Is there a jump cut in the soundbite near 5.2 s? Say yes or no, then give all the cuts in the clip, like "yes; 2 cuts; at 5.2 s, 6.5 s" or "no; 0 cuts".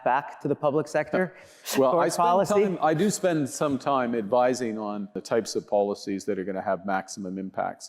yes; 1 cut; at 5.2 s